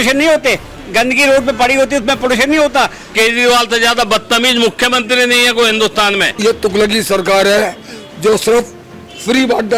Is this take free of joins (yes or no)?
no